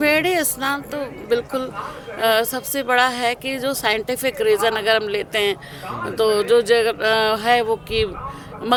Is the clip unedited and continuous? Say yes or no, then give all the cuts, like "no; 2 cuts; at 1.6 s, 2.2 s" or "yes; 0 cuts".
yes; 0 cuts